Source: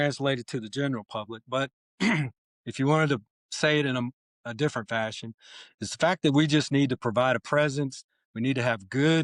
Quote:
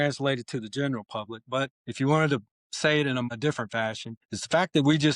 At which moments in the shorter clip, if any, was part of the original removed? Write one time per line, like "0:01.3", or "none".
0:01.8
0:03.7